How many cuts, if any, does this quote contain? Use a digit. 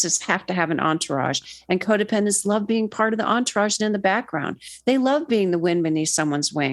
0